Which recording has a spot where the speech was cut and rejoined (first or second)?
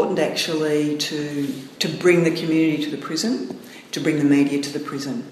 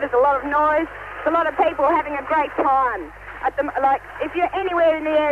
first